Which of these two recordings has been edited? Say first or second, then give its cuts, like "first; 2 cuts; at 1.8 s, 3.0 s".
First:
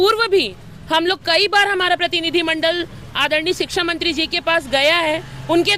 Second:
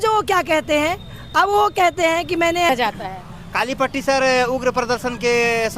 second; 1 cut; at 2.7 s